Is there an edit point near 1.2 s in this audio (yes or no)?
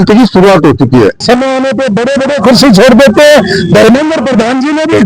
yes